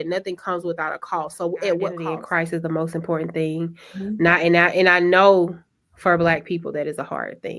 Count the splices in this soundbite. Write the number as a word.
one